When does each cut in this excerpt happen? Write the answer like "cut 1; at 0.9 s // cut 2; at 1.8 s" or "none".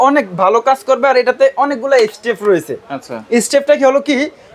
none